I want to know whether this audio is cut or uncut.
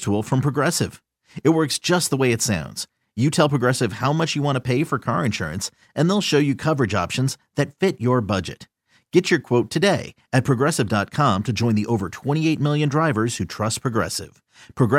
uncut